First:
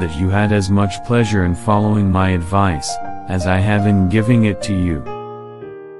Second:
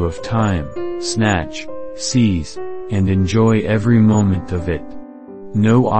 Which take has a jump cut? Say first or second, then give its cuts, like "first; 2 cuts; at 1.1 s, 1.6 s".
first; 1 cut; at 5.0 s